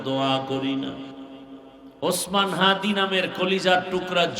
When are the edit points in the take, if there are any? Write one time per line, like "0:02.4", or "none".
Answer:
0:01.3